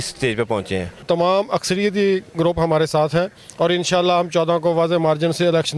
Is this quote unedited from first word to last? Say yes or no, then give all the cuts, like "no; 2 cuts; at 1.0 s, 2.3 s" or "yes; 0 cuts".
no; 1 cut; at 1.0 s